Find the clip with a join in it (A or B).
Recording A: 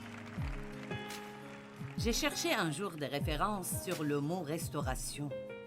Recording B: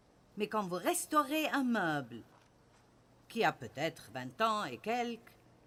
A